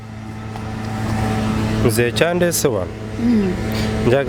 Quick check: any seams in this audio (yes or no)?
no